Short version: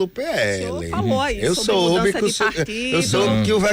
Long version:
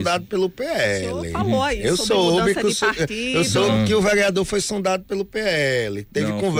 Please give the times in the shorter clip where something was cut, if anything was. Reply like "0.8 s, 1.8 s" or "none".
none